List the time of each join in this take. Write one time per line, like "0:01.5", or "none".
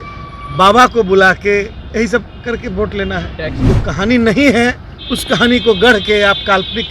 0:03.6